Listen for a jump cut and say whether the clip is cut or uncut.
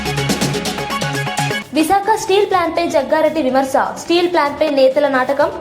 cut